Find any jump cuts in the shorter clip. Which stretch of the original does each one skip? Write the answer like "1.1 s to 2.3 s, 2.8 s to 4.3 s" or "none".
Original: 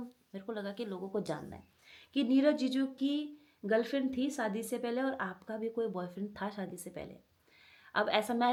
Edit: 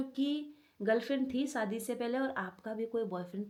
none

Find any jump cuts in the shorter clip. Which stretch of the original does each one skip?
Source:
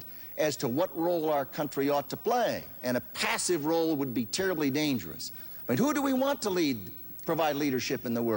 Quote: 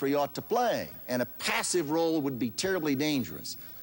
none

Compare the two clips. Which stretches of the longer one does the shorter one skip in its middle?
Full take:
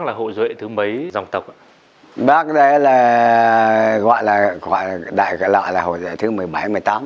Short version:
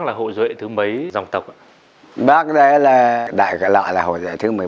3.2 s to 5.0 s

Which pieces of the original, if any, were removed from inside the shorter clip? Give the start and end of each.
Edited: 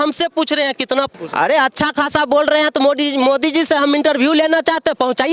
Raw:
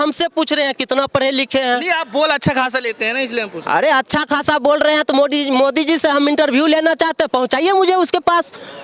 1.1 s to 3.4 s

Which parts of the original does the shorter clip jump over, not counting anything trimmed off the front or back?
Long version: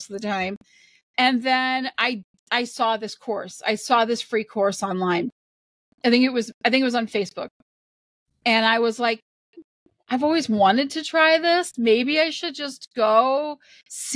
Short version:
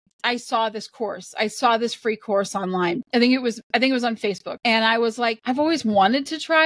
5.3 s to 5.9 s, 7.4 s to 8.3 s, 9.2 s to 10.0 s

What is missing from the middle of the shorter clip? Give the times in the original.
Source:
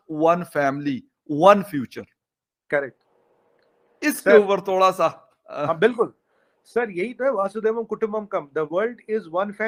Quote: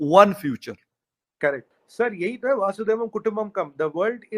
3.0 s to 6.5 s

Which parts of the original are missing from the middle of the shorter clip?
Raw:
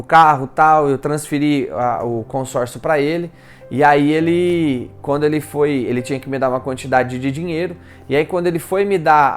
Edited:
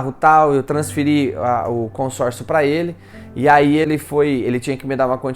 4.2 s to 5.3 s

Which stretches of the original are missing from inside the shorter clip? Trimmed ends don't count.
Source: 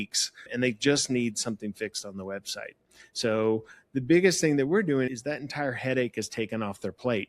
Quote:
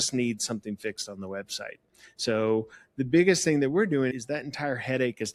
none

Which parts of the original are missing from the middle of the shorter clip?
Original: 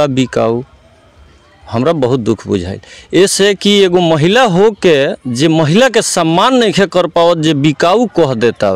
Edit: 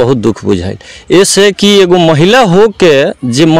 none

